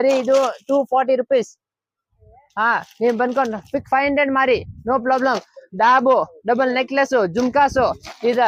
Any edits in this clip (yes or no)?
no